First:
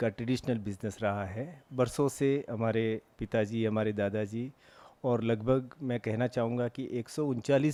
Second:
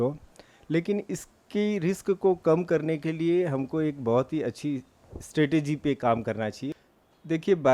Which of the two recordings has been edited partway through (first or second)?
second